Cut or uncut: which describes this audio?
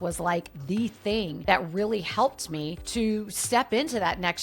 uncut